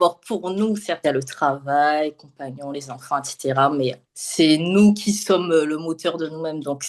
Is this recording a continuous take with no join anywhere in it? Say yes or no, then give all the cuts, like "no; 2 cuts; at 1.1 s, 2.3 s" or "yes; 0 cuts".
no; 1 cut; at 1.0 s